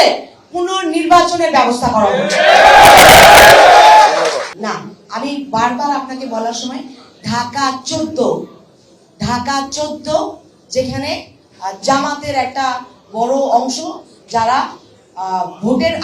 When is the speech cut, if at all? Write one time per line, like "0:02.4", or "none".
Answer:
none